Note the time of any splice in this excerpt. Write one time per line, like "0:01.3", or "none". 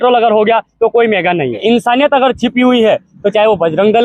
0:01.6